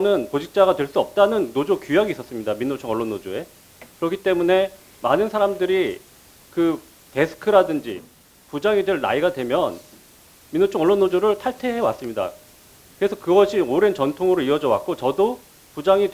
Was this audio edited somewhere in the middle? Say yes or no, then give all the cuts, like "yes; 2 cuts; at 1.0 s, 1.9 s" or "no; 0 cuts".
no; 0 cuts